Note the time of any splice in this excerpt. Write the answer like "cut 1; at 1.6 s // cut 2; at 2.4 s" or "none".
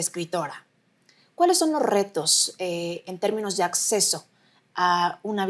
none